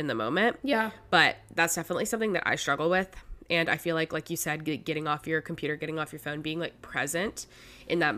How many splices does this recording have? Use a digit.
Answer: 0